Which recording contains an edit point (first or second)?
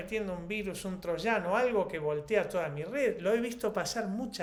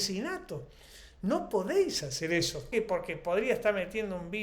second